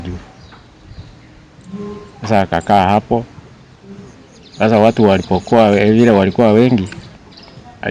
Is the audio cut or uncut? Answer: uncut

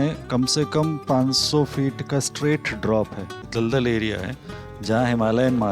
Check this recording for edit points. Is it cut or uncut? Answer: cut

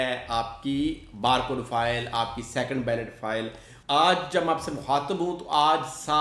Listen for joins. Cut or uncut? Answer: cut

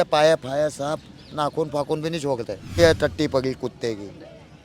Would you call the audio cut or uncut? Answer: cut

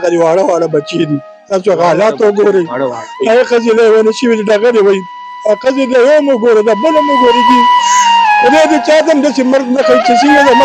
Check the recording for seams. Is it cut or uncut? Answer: uncut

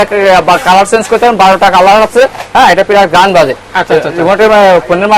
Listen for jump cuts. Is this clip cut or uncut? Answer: uncut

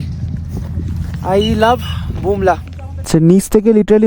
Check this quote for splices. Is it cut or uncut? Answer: cut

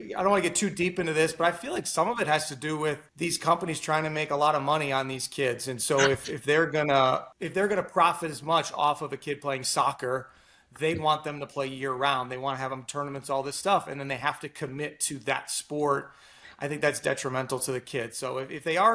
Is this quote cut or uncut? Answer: cut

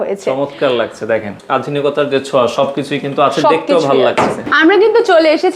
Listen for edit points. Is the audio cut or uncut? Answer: cut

